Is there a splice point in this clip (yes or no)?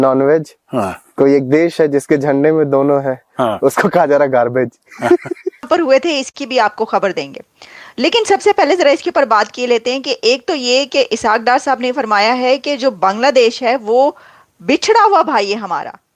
yes